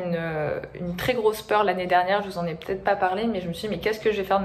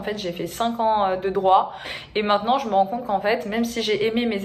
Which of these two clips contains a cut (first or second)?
second